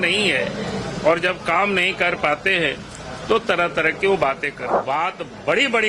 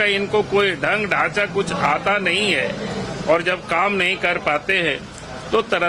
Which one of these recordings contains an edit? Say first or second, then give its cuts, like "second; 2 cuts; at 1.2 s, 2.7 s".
first; 1 cut; at 4.7 s